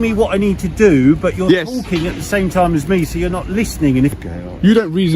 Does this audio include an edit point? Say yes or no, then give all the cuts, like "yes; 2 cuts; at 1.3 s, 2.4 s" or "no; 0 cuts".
yes; 1 cut; at 4.2 s